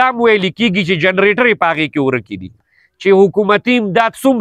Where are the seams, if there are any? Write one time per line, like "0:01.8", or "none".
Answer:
0:02.7